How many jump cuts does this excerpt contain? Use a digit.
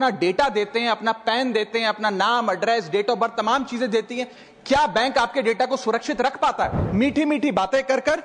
1